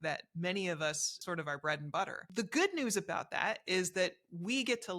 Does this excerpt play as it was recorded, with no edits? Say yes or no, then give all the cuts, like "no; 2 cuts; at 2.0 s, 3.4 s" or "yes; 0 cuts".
no; 2 cuts; at 1.1 s, 2.2 s